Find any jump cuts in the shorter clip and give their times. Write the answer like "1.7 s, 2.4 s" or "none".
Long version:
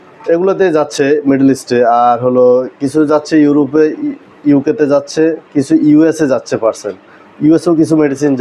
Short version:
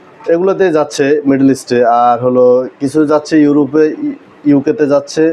none